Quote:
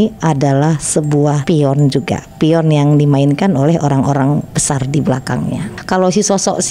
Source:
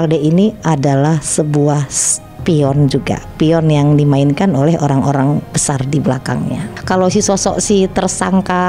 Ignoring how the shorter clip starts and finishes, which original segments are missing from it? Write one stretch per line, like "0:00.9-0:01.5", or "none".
0:01.8-0:02.4